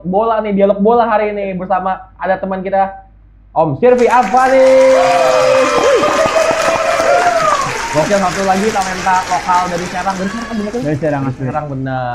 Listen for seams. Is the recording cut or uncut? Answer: uncut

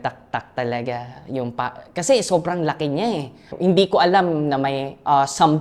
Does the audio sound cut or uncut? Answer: cut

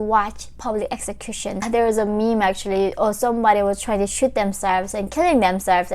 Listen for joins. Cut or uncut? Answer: cut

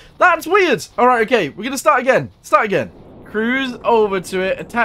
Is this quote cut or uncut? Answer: cut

